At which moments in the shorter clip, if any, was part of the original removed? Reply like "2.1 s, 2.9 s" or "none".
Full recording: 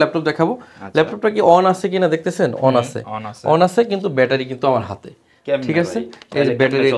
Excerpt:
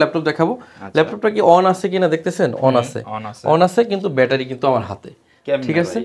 none